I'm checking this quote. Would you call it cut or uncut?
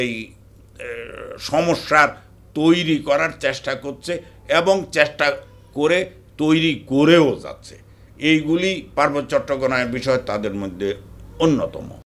uncut